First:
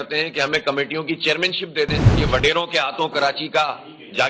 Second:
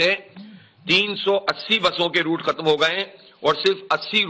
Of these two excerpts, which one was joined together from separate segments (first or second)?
first